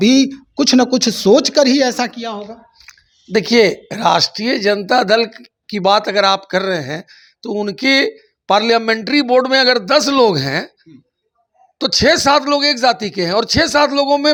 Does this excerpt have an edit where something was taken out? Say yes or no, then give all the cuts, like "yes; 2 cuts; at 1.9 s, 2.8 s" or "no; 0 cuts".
no; 0 cuts